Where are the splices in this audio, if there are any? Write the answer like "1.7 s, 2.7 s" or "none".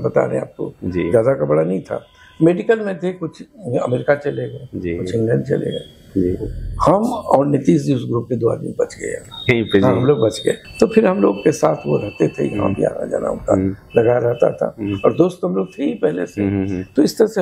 10.6 s